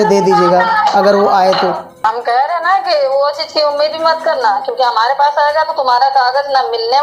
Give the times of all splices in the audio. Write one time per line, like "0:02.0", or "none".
0:02.0